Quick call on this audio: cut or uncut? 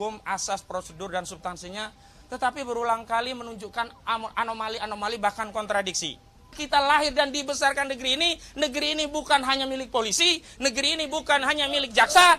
cut